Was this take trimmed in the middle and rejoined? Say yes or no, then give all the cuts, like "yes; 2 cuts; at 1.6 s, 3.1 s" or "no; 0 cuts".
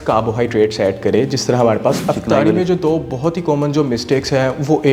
yes; 1 cut; at 2.0 s